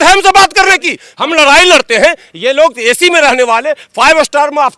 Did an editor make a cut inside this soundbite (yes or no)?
yes